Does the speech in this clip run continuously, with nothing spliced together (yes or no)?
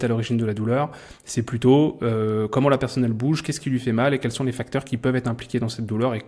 yes